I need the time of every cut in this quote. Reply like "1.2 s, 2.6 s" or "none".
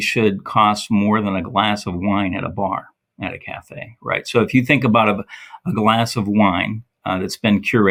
none